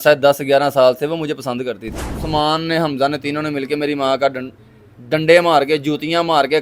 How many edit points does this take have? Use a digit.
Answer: 1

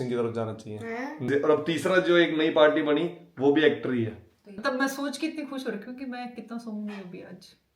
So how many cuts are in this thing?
2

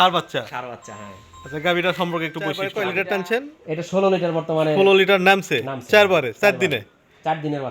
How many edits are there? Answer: 1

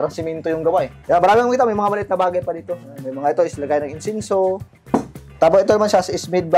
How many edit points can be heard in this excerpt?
2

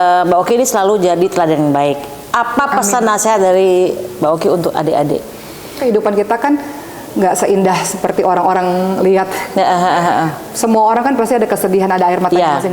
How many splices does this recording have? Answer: 1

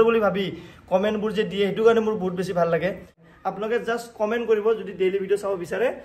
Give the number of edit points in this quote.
1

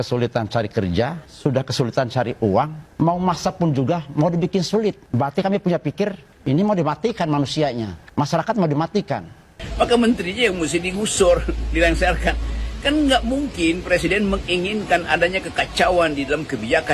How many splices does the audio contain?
6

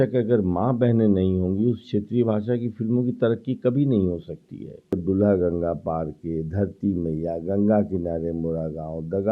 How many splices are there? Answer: 1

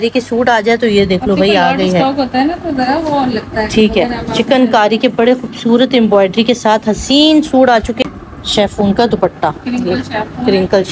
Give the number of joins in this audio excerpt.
1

